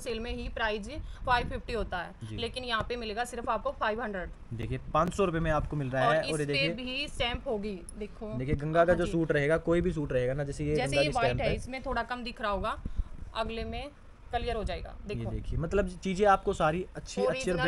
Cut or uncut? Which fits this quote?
uncut